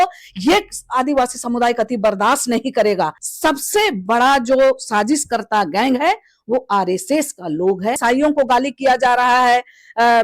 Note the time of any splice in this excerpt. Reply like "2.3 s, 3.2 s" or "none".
3.2 s, 8.0 s